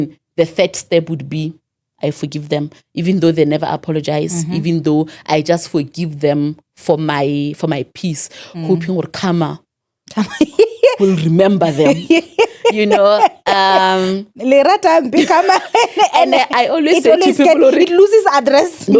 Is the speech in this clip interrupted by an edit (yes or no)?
no